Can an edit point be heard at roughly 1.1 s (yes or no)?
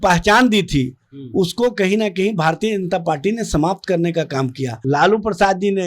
no